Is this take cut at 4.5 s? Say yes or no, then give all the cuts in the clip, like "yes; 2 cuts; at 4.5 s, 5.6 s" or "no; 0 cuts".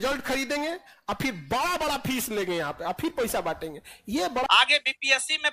yes; 1 cut; at 4.5 s